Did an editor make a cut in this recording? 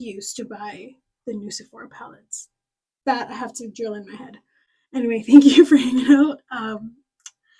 no; 0 cuts

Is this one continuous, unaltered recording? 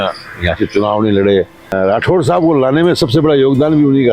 no; 1 cut; at 1.7 s

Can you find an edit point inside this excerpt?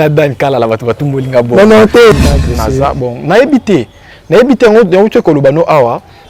yes; 1 cut; at 2.1 s

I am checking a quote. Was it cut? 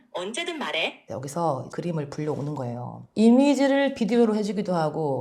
yes; 2 cuts; at 1.0 s, 1.7 s

